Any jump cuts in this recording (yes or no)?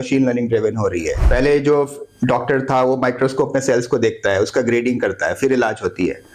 yes